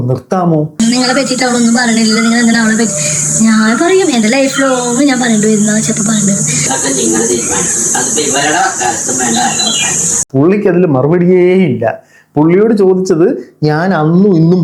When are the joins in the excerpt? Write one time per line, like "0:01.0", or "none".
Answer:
0:00.8
0:06.7